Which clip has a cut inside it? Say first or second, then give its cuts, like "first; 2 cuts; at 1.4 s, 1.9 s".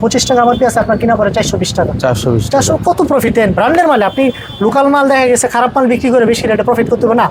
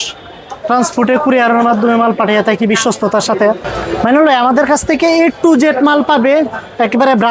second; 1 cut; at 3.7 s